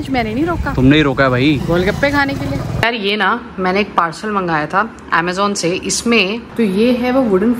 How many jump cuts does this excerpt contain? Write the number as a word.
three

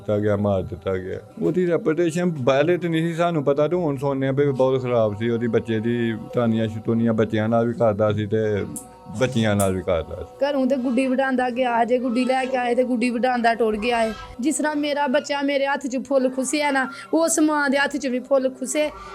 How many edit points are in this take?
four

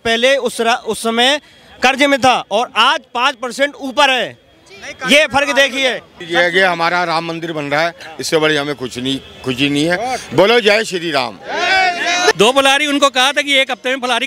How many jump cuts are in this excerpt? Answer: two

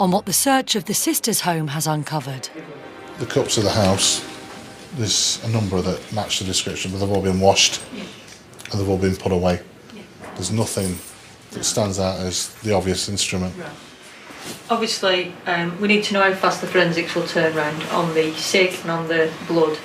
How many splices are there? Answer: one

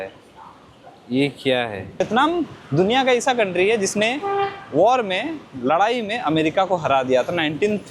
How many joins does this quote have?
one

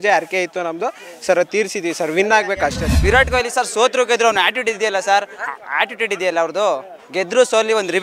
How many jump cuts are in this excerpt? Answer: one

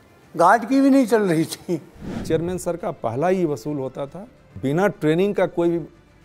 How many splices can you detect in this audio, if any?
two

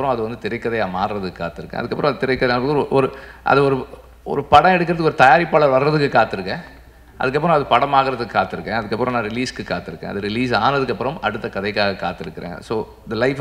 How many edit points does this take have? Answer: zero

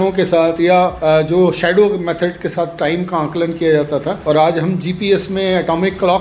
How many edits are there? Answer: two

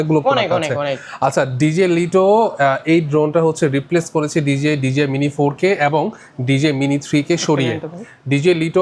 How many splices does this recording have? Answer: zero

